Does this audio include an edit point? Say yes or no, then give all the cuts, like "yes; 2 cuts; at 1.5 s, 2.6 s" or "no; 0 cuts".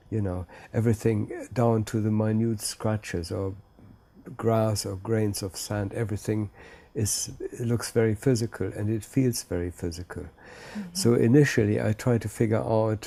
no; 0 cuts